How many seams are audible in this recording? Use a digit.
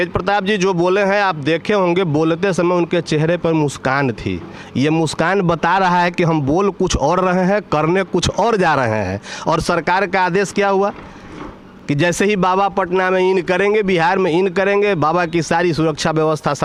0